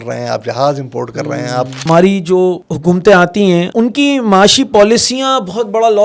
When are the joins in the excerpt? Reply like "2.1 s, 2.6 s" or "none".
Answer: 1.8 s, 2.7 s, 3.7 s